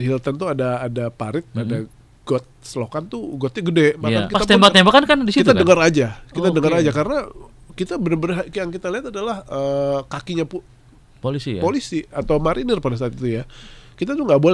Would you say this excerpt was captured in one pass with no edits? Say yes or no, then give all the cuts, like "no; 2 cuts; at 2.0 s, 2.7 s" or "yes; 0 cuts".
no; 1 cut; at 4.3 s